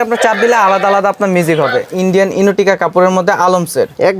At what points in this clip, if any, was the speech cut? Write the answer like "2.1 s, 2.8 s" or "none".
1.9 s